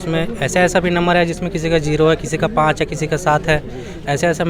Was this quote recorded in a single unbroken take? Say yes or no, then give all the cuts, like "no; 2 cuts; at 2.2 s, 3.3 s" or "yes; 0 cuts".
yes; 0 cuts